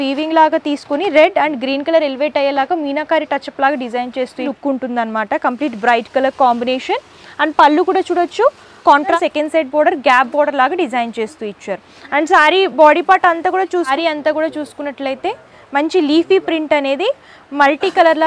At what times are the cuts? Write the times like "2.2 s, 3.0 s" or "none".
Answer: 4.5 s, 9.1 s, 13.9 s